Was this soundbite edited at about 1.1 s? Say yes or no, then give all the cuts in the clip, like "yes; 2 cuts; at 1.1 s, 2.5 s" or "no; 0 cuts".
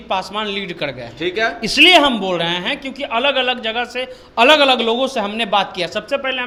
no; 0 cuts